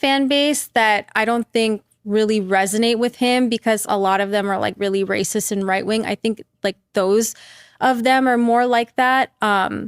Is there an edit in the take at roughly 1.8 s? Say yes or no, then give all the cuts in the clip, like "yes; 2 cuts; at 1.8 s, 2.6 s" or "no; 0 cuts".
no; 1 cut; at 6.9 s